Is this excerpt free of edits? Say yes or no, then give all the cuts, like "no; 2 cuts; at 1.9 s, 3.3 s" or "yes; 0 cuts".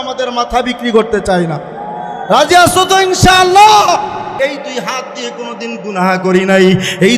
no; 1 cut; at 4.3 s